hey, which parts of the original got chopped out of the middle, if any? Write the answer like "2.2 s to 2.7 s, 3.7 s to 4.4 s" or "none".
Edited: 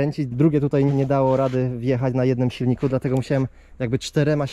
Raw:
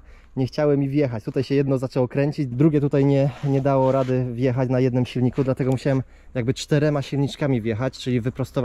3.1 s to 3.5 s